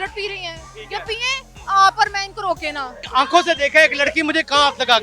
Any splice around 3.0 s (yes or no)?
yes